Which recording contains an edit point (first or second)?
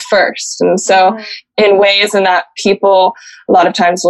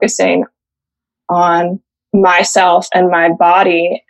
first